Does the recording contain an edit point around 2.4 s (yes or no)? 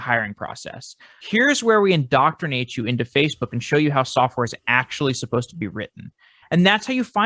no